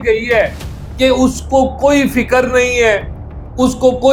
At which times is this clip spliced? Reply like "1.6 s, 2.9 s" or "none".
none